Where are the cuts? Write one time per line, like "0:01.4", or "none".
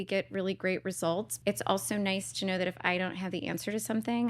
0:01.3